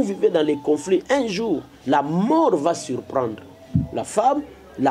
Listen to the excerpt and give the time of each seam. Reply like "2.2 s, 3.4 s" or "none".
none